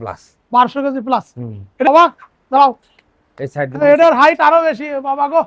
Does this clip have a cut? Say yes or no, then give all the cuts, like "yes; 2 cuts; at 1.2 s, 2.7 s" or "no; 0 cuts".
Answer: yes; 1 cut; at 1.9 s